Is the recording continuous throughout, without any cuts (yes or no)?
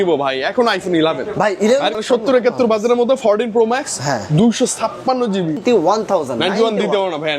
no